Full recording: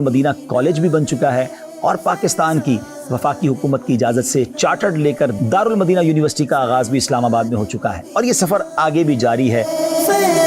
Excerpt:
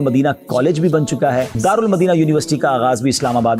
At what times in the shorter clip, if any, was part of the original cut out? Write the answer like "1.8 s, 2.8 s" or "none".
1.5 s